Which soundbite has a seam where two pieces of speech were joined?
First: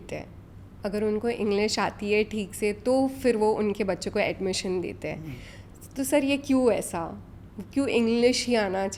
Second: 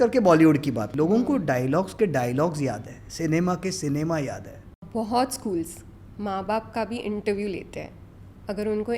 second; 2 cuts; at 0.9 s, 4.8 s

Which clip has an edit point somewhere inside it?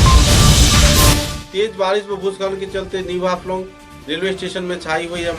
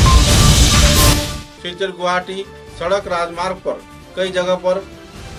first; 1 cut; at 1.3 s

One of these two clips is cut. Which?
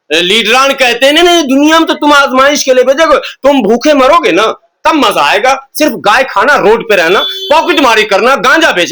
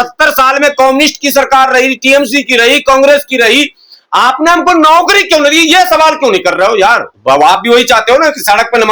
second; 1 cut; at 7.1 s

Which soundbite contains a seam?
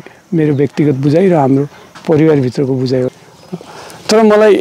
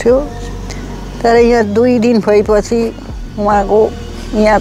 first; 1 cut; at 3.1 s

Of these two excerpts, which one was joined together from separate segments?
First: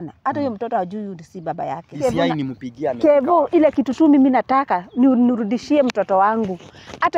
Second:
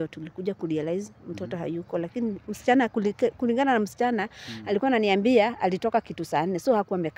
first; 1 cut; at 2.0 s

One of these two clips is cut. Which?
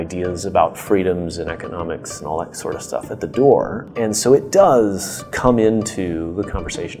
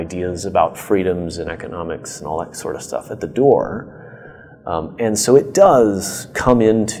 first; 1 cut; at 3.9 s

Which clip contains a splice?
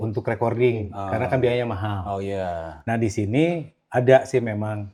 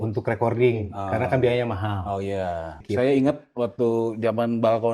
second; 1 cut; at 2.7 s

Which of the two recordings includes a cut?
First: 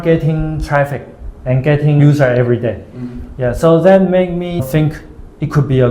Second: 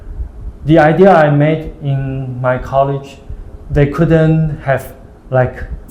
first; 1 cut; at 4.6 s

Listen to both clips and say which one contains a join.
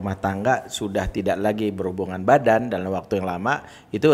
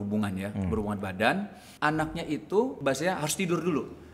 second; 2 cuts; at 1.6 s, 2.8 s

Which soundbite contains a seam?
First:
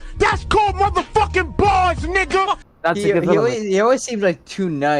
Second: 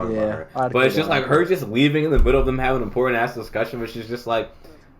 first; 1 cut; at 2.7 s

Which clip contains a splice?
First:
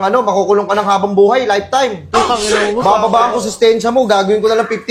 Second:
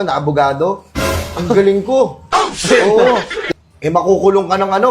second; 1 cut; at 3.4 s

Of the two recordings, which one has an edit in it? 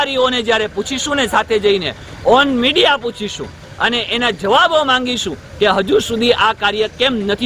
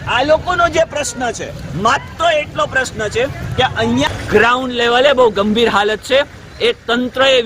second; 1 cut; at 4.1 s

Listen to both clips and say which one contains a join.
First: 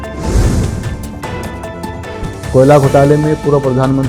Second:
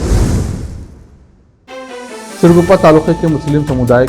second; 1 cut; at 1.7 s

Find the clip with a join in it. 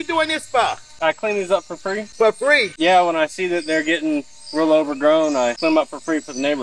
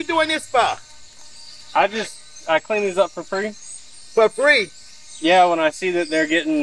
first; 4 cuts; at 0.9 s, 2.1 s, 2.7 s, 5.6 s

